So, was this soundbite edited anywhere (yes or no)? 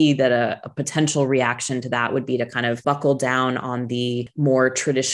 yes